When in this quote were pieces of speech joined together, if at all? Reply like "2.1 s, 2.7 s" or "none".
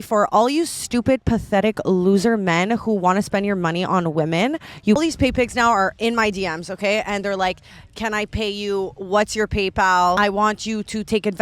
5.0 s, 7.7 s, 10.2 s